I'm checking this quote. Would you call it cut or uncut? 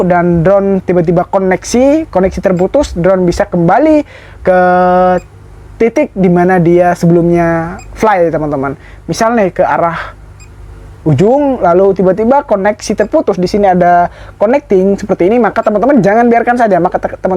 uncut